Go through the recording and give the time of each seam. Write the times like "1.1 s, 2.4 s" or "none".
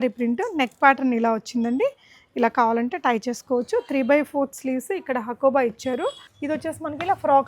6.3 s

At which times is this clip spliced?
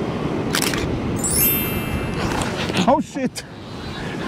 1.2 s

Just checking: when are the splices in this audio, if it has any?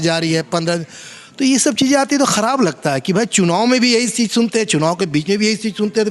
none

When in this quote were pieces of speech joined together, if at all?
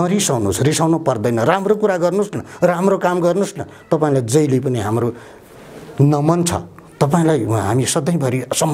none

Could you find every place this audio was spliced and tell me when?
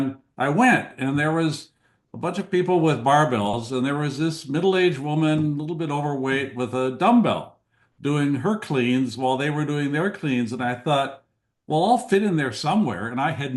none

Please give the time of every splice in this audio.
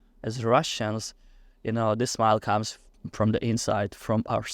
none

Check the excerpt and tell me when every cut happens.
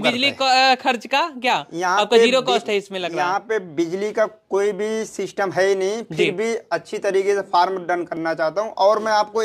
none

